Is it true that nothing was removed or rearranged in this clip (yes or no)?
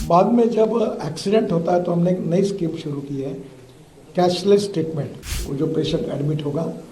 no